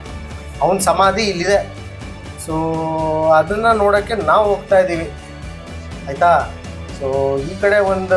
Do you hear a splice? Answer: no; 0 cuts

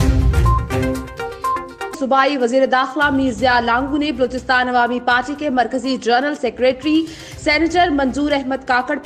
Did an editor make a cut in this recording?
yes; 1 cut; at 2.0 s

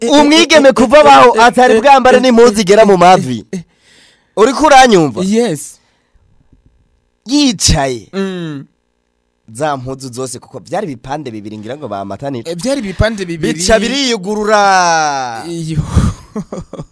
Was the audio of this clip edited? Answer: no; 0 cuts

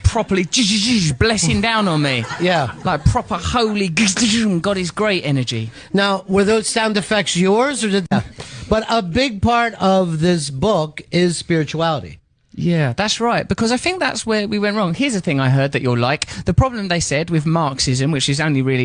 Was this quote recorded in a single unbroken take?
yes; 0 cuts

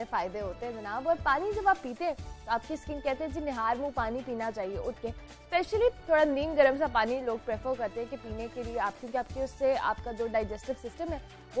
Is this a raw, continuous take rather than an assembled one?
yes; 0 cuts

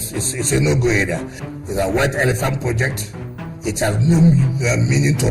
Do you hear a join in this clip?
yes; 1 cut; at 1.4 s

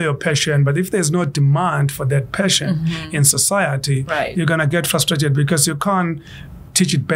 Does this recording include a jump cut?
no; 0 cuts

